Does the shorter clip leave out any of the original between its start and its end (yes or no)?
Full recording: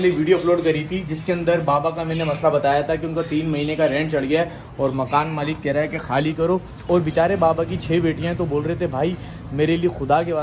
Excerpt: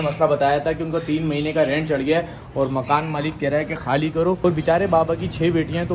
yes